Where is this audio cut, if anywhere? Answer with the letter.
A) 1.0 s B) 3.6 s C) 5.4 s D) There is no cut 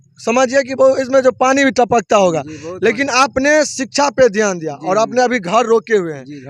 D